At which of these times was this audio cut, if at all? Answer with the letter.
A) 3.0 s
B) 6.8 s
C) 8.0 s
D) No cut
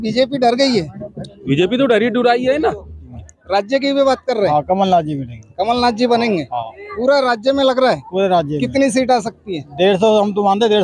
A